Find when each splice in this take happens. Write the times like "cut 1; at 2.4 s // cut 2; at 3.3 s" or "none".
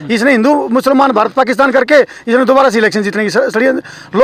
none